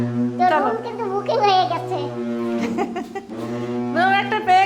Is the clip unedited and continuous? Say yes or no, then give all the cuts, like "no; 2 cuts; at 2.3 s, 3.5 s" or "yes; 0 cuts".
yes; 0 cuts